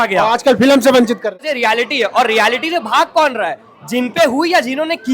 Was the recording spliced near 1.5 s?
yes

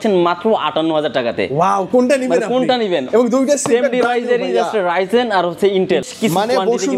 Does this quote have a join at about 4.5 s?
no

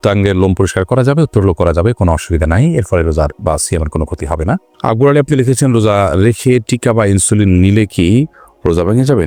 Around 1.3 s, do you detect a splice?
no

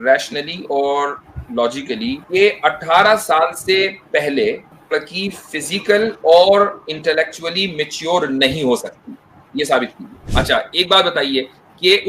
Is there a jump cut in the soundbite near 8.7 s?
no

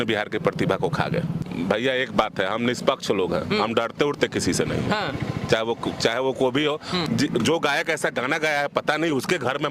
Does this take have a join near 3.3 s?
no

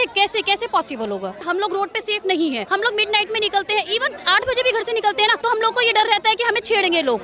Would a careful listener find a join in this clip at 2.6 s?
yes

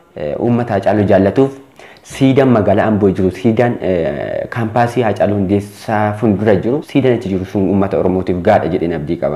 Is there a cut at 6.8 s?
yes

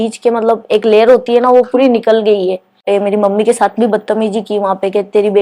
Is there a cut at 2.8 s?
yes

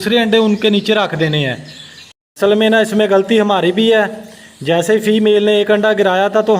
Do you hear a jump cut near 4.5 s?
no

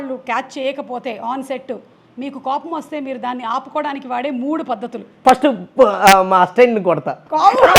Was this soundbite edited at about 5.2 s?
yes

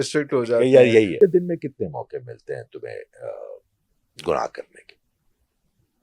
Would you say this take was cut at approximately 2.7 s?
no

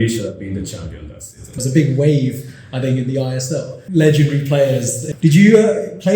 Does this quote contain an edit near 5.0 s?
yes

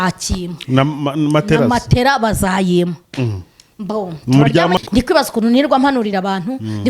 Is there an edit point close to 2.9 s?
no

